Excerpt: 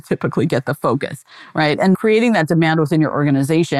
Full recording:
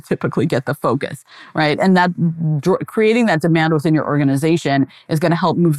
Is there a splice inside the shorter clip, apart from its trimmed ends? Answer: yes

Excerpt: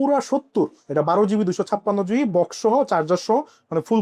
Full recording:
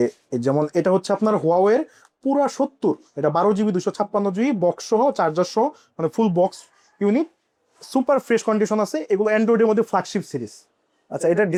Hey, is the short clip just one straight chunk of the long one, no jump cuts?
yes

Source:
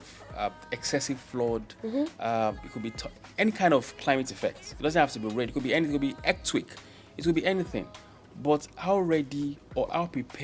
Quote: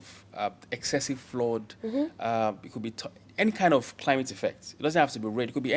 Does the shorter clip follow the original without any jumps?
yes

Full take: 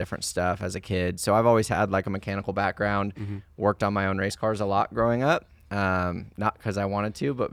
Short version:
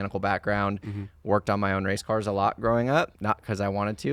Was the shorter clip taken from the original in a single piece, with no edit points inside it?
no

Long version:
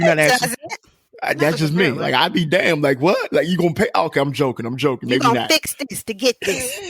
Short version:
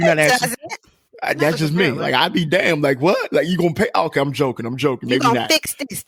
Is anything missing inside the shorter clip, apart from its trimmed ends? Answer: no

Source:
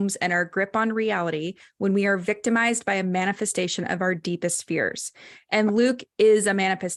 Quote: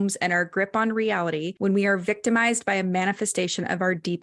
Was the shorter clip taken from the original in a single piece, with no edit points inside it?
no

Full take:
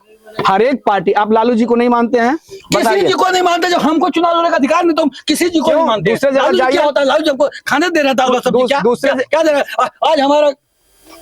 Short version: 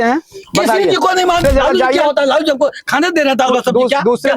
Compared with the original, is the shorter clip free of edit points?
no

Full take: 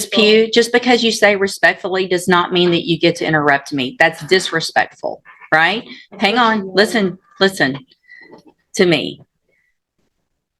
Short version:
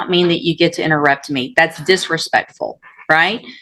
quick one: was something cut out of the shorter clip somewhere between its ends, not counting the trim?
no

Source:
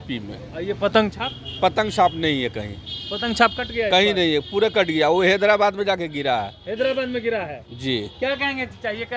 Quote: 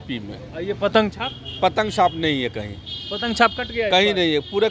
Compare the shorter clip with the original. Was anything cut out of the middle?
no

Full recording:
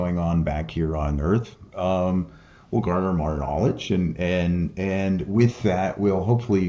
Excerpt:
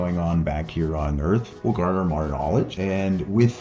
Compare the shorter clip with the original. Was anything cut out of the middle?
yes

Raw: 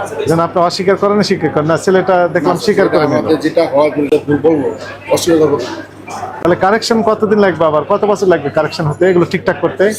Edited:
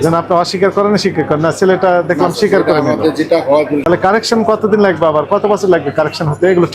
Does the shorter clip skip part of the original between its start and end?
yes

